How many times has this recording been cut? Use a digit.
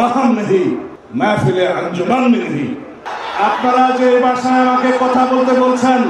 2